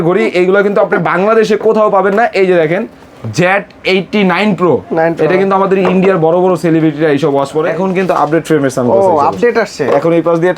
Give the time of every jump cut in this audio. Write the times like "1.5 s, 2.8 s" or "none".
7.7 s